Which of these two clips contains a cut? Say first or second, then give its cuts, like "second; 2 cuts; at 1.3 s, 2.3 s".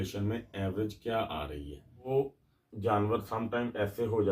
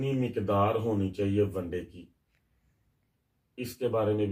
first; 1 cut; at 2.1 s